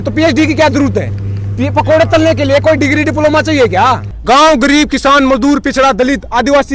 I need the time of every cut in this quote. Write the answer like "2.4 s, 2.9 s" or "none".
4.1 s